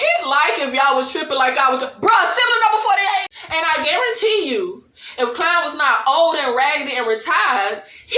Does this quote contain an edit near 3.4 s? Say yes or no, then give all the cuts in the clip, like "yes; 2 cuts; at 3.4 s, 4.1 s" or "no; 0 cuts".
yes; 1 cut; at 3.4 s